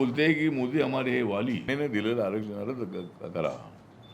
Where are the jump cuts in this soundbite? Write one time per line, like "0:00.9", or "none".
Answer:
0:01.6